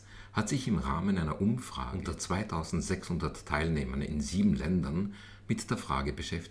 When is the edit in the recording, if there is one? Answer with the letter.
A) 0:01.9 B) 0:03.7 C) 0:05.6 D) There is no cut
A